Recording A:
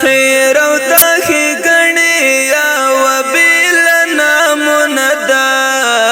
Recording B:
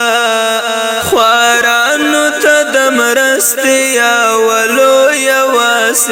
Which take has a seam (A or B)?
A